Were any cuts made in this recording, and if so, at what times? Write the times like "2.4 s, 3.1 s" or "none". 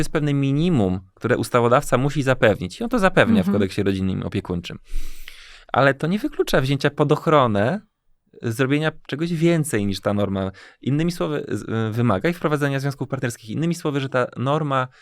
none